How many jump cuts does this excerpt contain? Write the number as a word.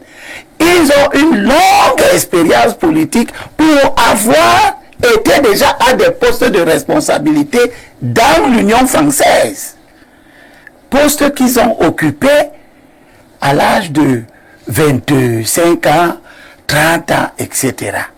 zero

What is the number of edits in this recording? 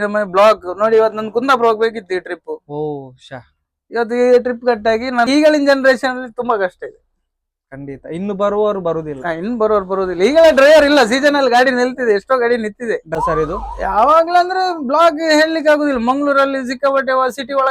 two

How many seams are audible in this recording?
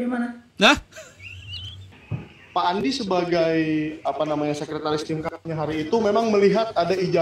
one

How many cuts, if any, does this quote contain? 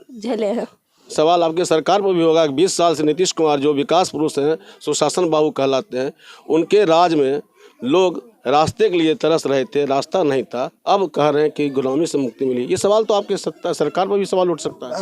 one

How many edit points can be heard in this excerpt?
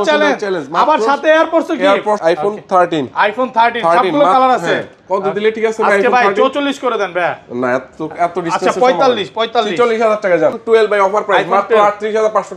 two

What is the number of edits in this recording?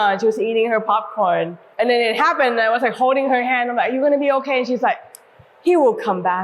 one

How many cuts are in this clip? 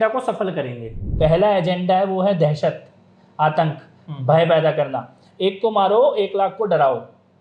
one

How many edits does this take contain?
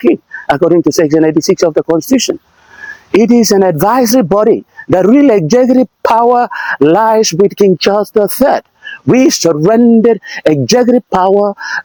zero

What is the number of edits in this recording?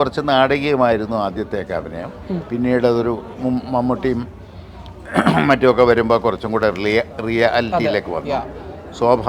zero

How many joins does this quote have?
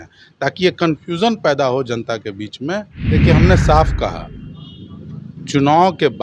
one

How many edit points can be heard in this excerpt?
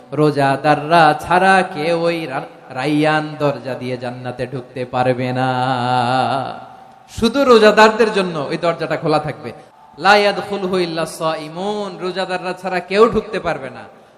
one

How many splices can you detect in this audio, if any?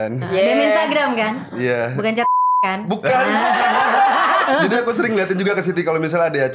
one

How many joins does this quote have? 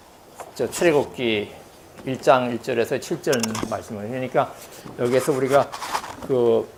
zero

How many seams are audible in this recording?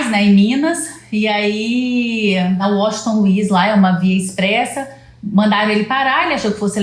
one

